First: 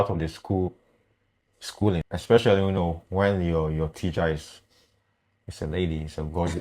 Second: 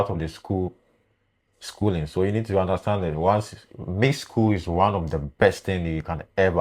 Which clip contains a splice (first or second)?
first